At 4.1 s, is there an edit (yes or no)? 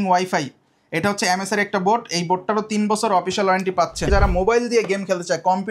yes